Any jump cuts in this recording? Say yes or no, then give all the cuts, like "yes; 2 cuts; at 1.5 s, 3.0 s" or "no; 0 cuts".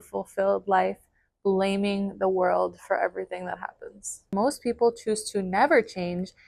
yes; 1 cut; at 4.3 s